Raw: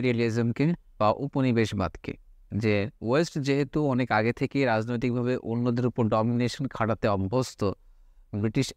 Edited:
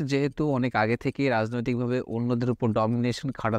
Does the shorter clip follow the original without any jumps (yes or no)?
yes